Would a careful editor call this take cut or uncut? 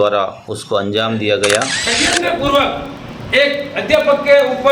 cut